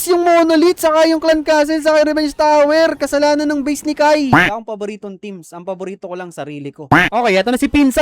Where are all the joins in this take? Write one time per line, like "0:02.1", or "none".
0:04.4
0:06.9